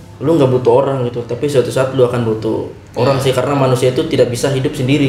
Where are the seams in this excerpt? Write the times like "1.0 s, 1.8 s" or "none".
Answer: none

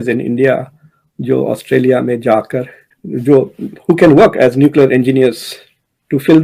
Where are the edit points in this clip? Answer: none

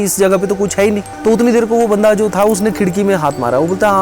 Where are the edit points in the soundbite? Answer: 1.1 s

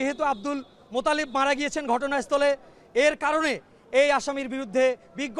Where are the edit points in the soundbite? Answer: none

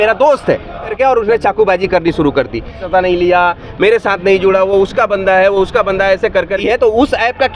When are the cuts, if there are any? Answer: 0.9 s, 2.8 s, 6.6 s

